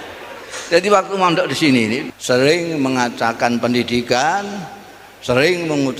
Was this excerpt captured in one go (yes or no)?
no